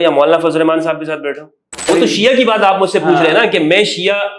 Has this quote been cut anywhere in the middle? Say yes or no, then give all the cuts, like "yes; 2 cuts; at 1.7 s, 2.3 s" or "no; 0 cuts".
yes; 1 cut; at 1.8 s